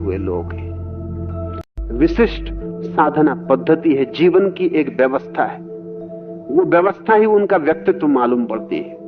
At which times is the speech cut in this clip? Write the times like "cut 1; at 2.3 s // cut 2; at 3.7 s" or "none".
cut 1; at 1.5 s